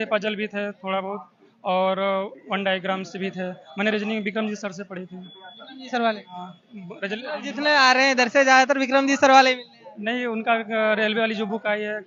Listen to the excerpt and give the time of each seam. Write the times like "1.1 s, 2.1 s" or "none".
none